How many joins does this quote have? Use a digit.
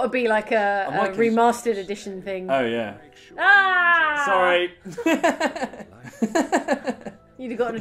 0